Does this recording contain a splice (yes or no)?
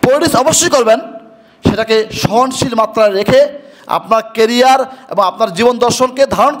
no